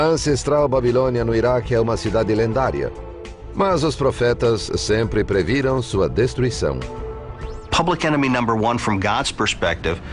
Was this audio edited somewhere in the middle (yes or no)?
no